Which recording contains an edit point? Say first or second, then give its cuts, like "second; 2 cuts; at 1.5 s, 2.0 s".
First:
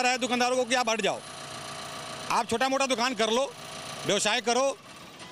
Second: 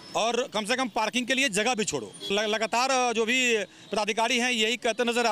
second; 1 cut; at 2.3 s